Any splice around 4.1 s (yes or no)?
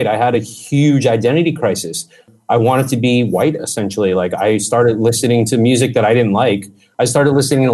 no